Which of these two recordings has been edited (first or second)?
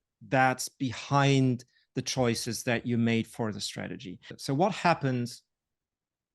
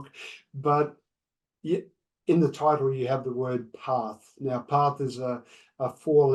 first